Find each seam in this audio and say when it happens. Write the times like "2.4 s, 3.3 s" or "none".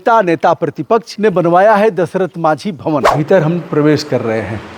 1.1 s, 3.1 s